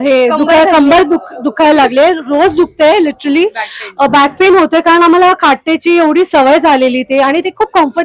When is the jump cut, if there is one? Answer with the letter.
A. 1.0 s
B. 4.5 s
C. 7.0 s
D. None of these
D